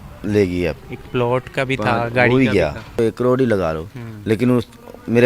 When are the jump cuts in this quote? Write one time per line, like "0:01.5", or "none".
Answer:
0:03.0